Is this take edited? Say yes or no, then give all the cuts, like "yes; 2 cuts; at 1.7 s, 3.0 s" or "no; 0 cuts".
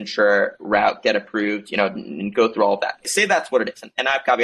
yes; 1 cut; at 3.1 s